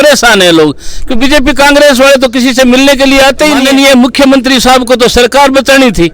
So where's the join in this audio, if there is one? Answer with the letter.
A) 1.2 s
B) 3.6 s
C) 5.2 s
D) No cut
B